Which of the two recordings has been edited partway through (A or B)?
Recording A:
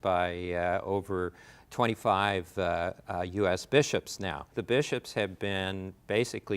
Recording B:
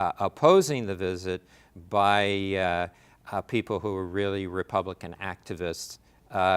A